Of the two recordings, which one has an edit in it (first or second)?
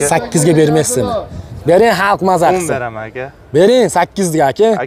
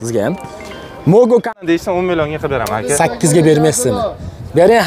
second